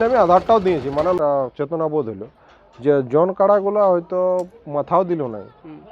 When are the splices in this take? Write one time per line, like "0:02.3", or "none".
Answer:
0:01.2